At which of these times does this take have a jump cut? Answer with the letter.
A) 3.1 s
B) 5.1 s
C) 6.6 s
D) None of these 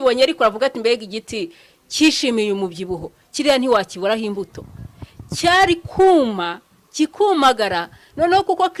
D